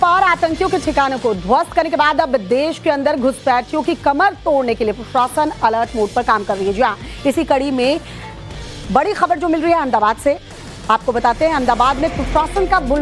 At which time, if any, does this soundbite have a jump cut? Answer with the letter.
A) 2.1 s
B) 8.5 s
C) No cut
A